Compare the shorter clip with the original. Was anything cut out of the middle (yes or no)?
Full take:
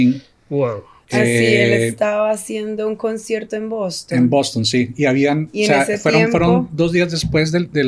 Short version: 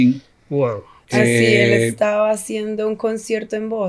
no